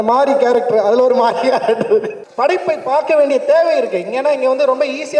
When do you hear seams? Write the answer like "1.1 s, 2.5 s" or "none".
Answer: 2.2 s

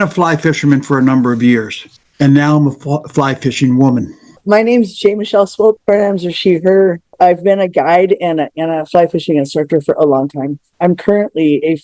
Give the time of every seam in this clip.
4.3 s, 5.8 s, 7.1 s

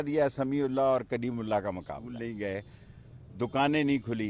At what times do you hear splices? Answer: 2.0 s

